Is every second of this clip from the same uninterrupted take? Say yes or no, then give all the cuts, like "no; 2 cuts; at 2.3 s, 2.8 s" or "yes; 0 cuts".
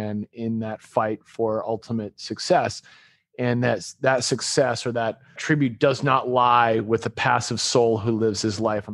no; 1 cut; at 5.4 s